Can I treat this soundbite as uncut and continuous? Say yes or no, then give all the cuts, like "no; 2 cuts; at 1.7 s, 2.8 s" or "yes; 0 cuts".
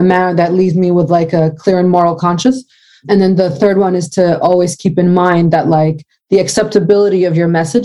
yes; 0 cuts